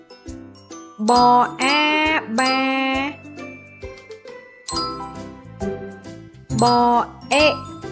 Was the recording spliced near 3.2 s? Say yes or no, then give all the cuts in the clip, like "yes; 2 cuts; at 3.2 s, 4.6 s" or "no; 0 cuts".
yes; 3 cuts; at 0.9 s, 3.2 s, 6.5 s